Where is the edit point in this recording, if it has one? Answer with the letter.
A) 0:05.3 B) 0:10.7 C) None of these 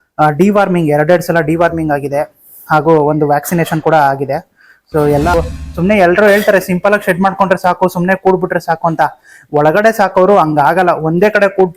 A